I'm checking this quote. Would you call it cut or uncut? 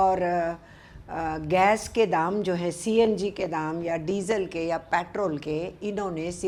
uncut